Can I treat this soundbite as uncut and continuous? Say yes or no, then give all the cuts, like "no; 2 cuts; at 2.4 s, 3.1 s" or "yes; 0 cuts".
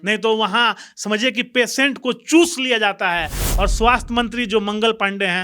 no; 1 cut; at 3.4 s